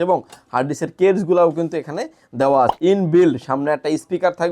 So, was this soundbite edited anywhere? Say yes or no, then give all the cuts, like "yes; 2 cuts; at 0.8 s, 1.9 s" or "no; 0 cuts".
yes; 1 cut; at 2.7 s